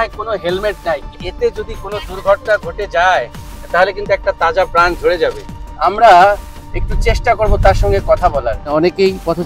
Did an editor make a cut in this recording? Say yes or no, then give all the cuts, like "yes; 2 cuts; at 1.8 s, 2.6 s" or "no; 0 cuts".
yes; 2 cuts; at 1.2 s, 8.6 s